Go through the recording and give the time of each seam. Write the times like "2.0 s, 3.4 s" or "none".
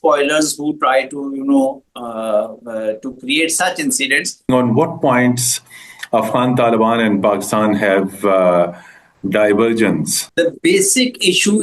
4.5 s, 10.2 s